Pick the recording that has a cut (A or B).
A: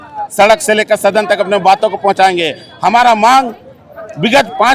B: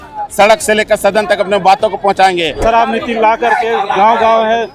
B